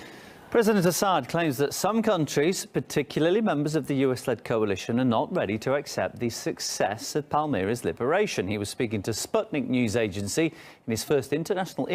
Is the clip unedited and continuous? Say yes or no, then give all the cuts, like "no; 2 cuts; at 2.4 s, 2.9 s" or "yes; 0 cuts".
yes; 0 cuts